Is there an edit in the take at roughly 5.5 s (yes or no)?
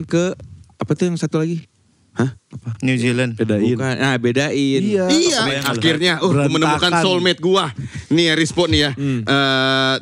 yes